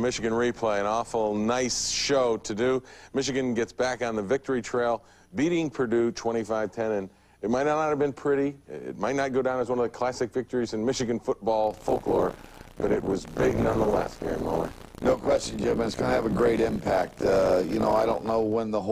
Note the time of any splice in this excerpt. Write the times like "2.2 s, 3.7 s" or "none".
15.7 s